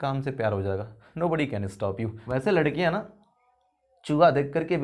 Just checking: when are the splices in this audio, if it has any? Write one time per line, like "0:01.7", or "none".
0:01.0
0:02.2